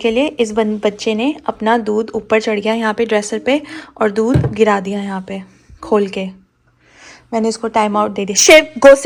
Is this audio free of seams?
yes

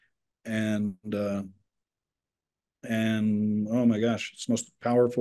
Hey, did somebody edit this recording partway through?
no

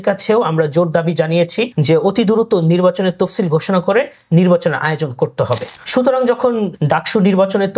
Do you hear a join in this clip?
yes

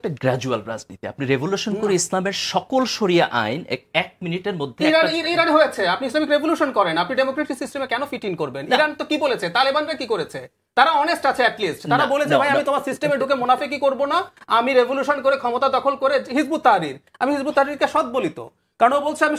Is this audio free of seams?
yes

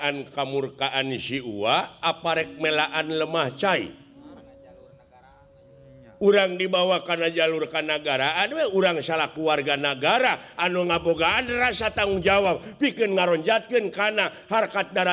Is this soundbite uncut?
no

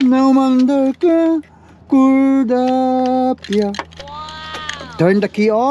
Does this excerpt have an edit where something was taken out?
no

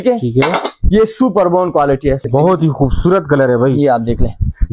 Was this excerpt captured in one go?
no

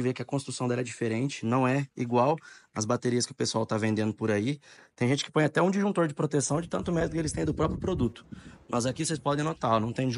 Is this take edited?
no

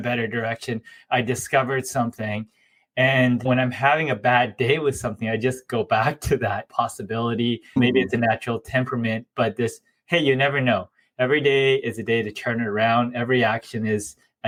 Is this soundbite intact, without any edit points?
yes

